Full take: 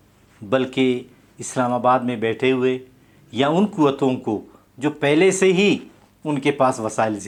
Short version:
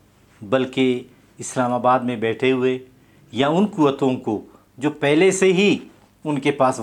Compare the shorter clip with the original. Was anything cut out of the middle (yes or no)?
no